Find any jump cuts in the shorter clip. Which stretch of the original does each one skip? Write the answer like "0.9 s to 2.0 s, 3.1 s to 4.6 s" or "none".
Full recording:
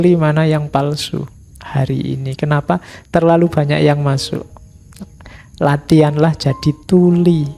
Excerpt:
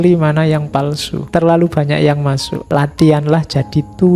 1.1 s to 2.9 s, 4.3 s to 5.4 s